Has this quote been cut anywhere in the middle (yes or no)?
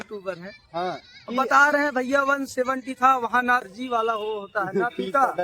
yes